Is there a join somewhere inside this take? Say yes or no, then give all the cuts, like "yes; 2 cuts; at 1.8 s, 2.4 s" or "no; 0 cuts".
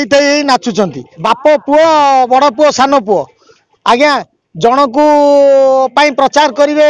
yes; 1 cut; at 1.1 s